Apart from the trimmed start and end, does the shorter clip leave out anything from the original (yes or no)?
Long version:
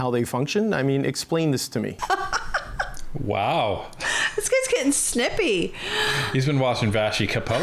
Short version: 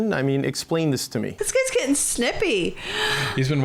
yes